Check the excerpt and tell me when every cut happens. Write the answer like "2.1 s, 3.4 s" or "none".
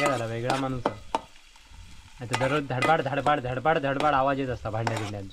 none